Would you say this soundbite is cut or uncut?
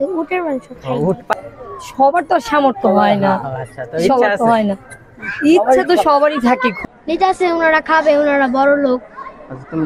cut